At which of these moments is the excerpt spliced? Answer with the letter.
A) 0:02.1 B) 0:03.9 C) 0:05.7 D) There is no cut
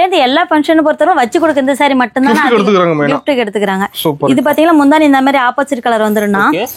D